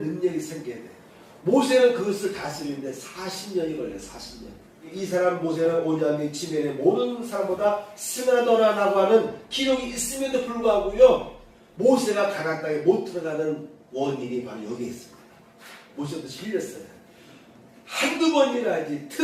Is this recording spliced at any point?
yes; 2 cuts; at 4.9 s, 15.9 s

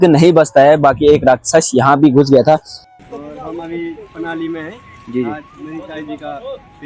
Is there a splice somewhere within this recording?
yes; 1 cut; at 2.8 s

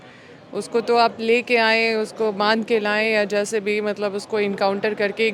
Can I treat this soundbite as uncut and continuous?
yes; 0 cuts

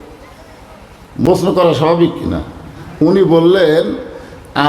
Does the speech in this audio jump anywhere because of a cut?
yes; 1 cut; at 1.3 s

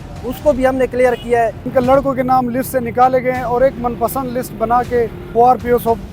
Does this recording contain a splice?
yes; 2 cuts; at 1.6 s, 5.2 s

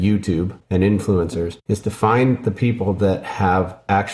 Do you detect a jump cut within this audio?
yes; 1 cut; at 1.6 s

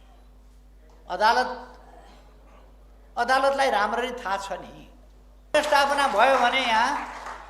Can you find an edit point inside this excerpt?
yes; 1 cut; at 5.5 s

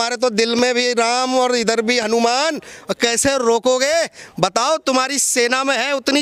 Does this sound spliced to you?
no; 0 cuts

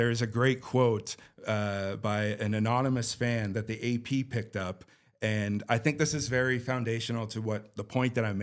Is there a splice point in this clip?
no; 0 cuts

